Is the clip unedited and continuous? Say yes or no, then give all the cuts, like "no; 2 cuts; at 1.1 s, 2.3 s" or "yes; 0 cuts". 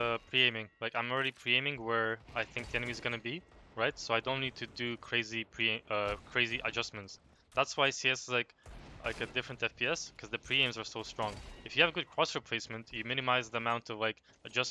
yes; 0 cuts